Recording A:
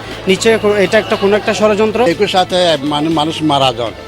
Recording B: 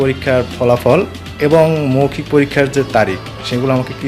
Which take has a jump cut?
A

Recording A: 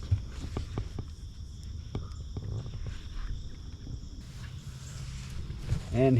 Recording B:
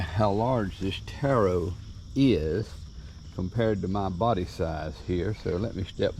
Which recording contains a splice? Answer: A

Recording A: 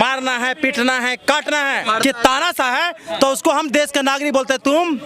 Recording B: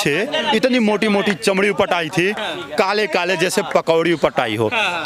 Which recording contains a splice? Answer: A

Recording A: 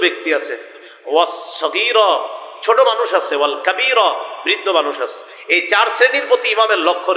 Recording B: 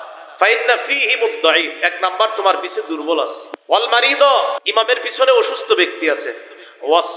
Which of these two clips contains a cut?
B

